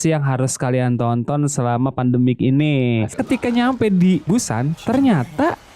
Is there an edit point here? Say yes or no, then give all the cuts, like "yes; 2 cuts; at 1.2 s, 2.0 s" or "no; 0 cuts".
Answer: yes; 1 cut; at 3.1 s